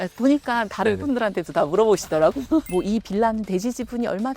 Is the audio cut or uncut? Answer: cut